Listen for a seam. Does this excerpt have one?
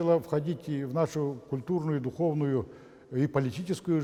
no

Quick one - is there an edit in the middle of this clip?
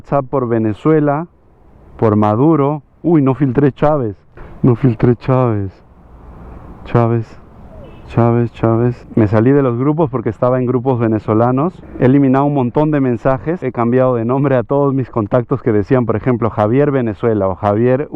yes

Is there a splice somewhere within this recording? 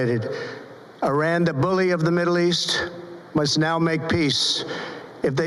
no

